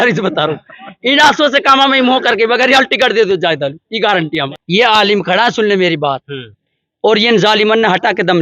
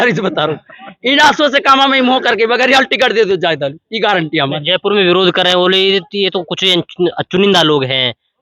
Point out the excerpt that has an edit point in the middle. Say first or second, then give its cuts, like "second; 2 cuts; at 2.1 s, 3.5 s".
first; 1 cut; at 4.5 s